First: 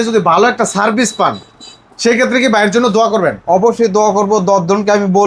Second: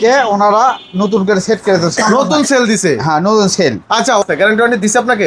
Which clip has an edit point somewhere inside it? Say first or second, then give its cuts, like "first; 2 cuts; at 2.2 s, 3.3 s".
second; 1 cut; at 4.2 s